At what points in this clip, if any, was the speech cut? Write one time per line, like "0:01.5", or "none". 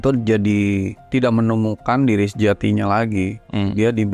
0:01.1